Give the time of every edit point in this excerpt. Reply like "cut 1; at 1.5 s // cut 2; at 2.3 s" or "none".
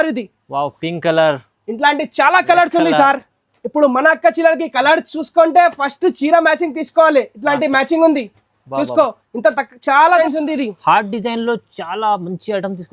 cut 1; at 10.2 s